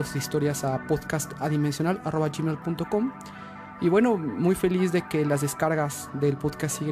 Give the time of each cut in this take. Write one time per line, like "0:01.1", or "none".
0:04.2